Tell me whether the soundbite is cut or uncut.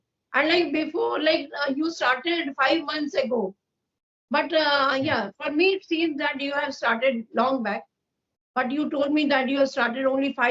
uncut